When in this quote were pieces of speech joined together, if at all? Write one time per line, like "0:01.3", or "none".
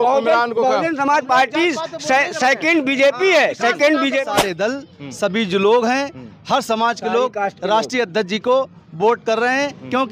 0:04.4